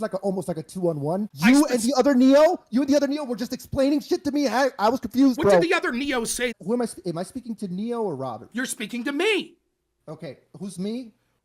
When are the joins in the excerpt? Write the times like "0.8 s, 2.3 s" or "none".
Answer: 1.3 s, 6.5 s